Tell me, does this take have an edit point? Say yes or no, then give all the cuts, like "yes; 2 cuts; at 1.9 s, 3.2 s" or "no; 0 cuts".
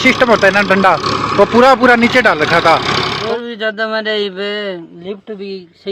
yes; 1 cut; at 3.1 s